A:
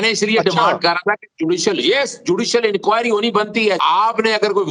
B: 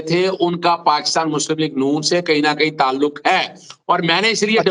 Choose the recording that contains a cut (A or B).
A